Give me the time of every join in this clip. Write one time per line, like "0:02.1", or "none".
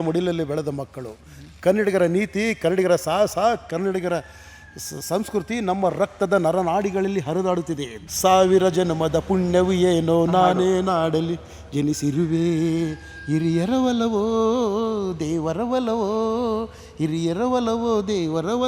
0:07.9